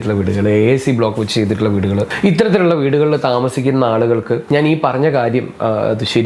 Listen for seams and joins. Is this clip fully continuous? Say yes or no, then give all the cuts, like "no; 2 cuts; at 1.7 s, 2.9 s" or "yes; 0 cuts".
no; 2 cuts; at 2.1 s, 4.4 s